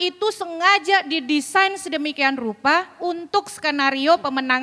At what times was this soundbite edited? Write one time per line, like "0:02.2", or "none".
none